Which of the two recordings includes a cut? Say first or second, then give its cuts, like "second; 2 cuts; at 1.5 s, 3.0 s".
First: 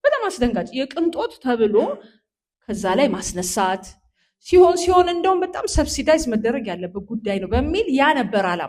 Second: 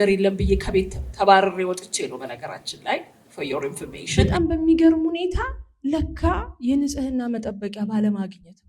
second; 1 cut; at 4.0 s